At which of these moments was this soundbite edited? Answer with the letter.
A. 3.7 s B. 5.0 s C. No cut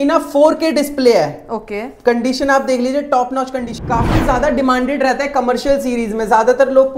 A